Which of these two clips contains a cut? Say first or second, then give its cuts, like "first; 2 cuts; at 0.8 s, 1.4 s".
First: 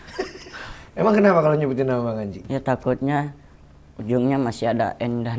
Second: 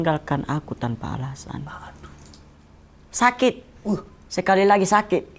first; 1 cut; at 2.5 s